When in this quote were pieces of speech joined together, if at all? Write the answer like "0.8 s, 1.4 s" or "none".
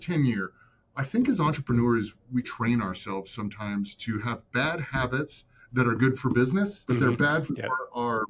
6.8 s